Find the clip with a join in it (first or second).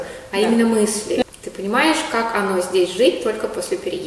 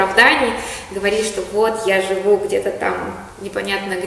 first